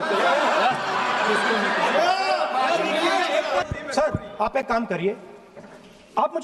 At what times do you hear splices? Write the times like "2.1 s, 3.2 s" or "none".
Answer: 3.6 s